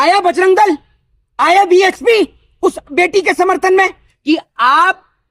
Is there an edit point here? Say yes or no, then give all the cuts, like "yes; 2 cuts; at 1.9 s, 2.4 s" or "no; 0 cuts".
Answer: yes; 1 cut; at 4.1 s